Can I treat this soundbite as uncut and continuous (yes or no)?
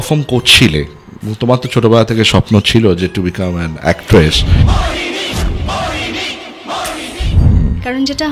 no